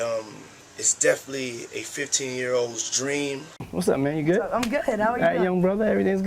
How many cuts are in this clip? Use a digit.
1